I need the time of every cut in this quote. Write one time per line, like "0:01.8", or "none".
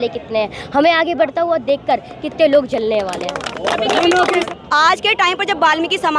0:04.5